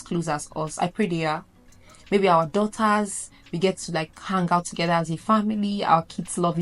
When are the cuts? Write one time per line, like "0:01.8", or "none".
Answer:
none